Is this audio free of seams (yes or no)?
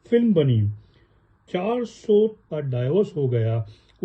no